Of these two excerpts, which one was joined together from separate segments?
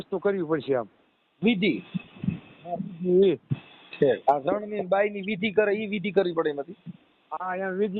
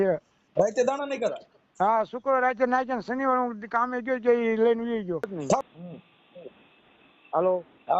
second; 1 cut; at 5.6 s

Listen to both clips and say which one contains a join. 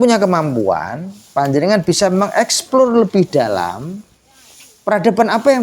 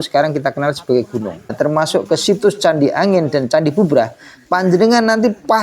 second; 1 cut; at 1.6 s

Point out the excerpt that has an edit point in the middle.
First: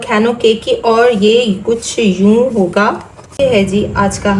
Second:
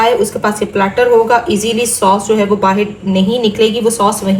first; 1 cut; at 3.4 s

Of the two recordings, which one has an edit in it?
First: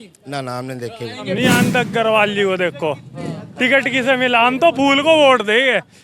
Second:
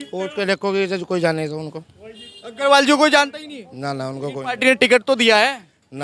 first; 1 cut; at 1.4 s

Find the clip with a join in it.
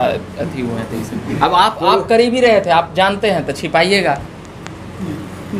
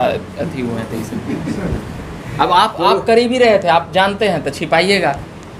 first; 1 cut; at 1.3 s

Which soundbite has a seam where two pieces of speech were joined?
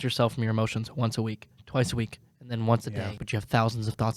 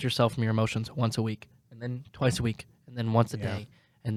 first; 2 cuts; at 1.5 s, 3.2 s

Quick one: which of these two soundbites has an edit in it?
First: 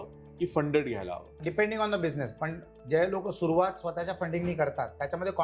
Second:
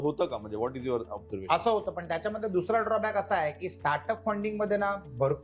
first; 1 cut; at 1.4 s

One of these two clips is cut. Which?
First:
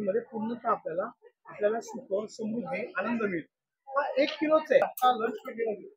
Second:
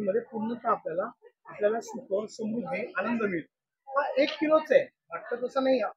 first; 1 cut; at 4.8 s

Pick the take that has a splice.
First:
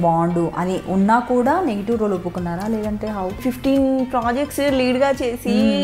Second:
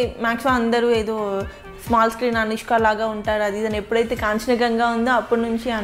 first; 1 cut; at 3.4 s

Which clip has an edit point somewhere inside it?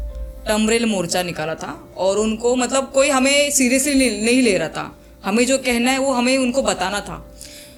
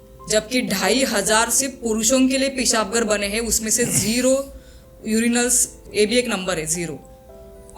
second; 1 cut; at 5.8 s

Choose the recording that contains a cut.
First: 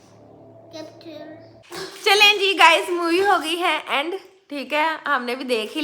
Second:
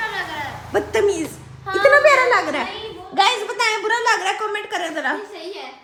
first; 1 cut; at 1.7 s

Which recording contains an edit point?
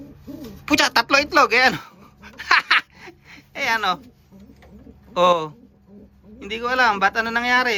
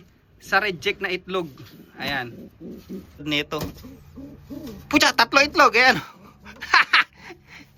second; 1 cut; at 3.2 s

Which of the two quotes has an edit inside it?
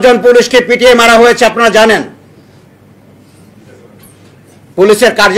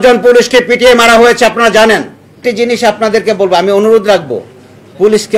second; 1 cut; at 2.4 s

